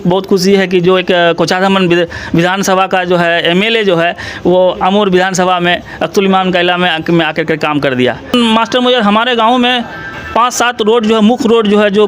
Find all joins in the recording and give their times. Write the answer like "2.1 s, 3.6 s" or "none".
8.3 s